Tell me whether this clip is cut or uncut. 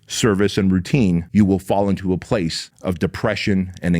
cut